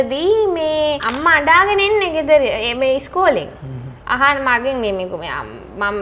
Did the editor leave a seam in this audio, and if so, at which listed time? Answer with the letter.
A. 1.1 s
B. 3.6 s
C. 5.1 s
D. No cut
A